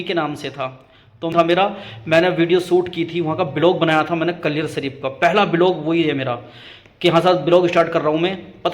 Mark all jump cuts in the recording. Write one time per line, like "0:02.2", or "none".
0:01.3